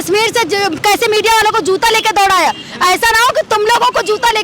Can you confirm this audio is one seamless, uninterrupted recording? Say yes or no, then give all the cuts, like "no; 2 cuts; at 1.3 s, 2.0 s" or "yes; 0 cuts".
yes; 0 cuts